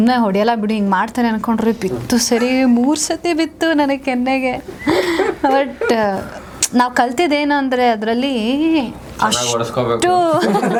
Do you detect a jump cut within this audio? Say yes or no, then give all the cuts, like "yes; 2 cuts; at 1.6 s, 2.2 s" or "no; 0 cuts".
no; 0 cuts